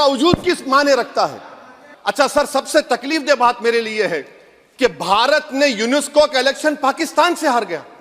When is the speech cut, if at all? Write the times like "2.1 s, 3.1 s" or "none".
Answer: 2.0 s